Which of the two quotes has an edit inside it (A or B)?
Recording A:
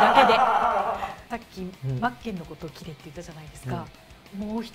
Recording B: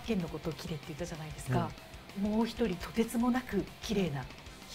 A